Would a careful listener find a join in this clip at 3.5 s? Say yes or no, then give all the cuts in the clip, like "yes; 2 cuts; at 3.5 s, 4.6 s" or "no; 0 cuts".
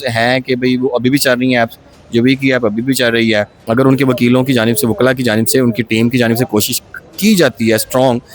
yes; 1 cut; at 3.5 s